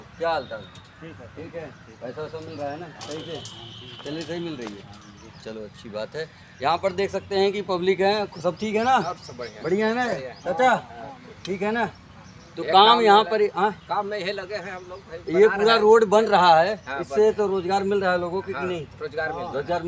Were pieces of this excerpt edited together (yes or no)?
no